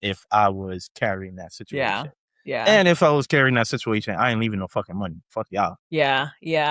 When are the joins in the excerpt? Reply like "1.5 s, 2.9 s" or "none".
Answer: 5.8 s